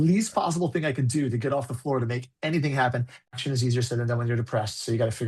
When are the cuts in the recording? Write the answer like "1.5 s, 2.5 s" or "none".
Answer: 3.3 s